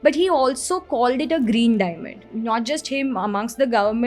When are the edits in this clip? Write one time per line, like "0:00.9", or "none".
0:02.1